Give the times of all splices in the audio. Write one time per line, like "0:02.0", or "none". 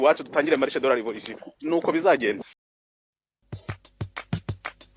0:02.9